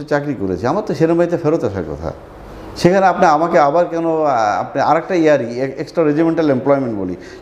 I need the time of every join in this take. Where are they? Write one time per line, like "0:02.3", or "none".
none